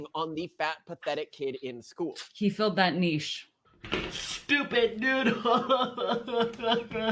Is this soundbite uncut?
no; 1 cut; at 3.6 s

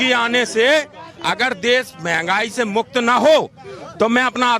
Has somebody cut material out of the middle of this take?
no; 0 cuts

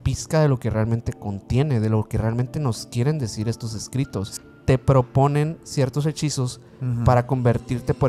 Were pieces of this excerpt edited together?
yes; 1 cut; at 4.3 s

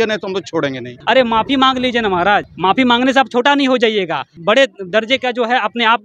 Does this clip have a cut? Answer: yes; 3 cuts; at 0.9 s, 2.5 s, 4.4 s

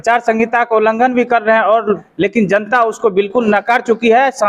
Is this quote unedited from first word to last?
no; 1 cut; at 2.1 s

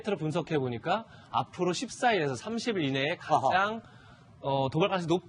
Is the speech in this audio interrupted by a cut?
yes; 1 cut; at 3.3 s

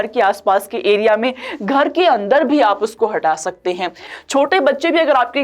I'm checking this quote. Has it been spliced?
yes; 1 cut; at 4.1 s

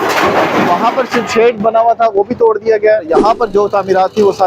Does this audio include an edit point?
yes; 1 cut; at 3.1 s

